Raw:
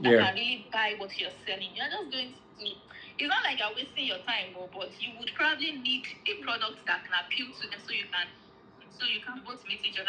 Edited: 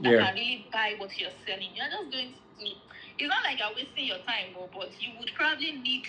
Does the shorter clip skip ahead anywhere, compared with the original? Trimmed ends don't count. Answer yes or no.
no